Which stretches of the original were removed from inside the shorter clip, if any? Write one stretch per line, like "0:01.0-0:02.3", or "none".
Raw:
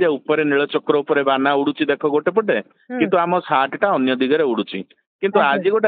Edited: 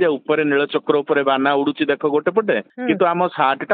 0:02.7-0:02.8